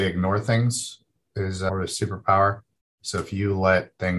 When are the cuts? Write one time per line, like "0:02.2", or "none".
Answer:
none